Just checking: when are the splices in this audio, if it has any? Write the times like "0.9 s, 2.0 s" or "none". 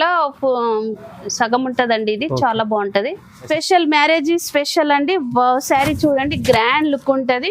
3.5 s

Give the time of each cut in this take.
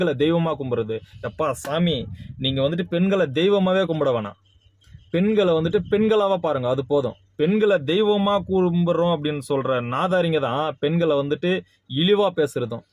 none

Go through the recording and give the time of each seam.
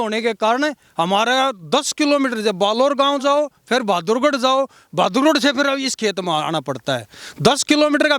none

